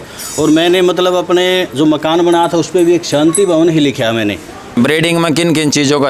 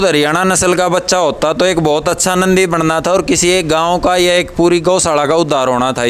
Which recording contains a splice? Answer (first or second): first